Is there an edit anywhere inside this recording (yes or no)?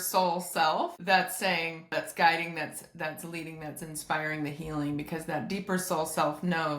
yes